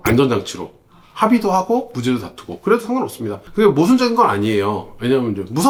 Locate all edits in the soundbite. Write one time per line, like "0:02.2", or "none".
none